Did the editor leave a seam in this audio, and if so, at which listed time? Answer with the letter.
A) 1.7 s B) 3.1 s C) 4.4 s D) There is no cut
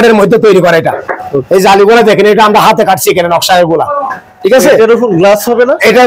D